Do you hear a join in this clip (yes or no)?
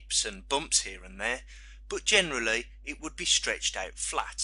no